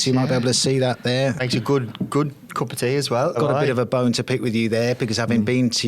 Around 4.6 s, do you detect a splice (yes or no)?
no